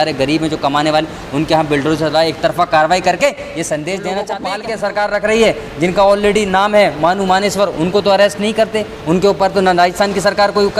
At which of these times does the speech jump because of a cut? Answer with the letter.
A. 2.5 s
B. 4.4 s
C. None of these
B